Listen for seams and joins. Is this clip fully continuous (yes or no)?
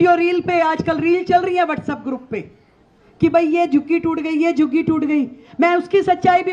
yes